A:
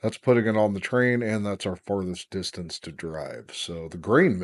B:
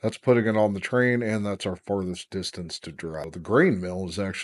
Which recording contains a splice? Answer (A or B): B